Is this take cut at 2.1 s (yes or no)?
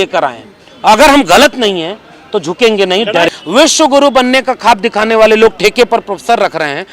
no